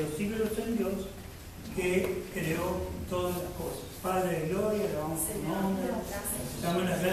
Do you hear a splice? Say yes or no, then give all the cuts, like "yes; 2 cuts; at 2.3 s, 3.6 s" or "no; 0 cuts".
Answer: no; 0 cuts